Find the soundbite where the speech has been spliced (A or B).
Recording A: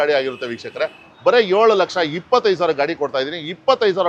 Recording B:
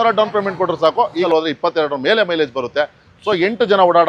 B